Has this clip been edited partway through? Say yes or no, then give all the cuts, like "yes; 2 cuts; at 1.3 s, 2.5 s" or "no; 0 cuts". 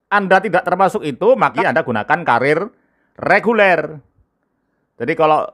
yes; 1 cut; at 1.6 s